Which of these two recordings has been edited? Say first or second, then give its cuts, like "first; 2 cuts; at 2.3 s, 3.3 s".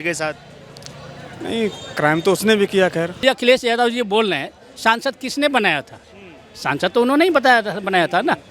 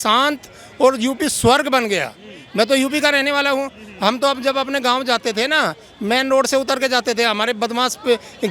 first; 1 cut; at 3.2 s